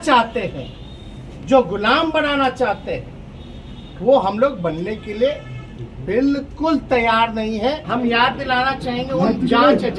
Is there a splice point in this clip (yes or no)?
yes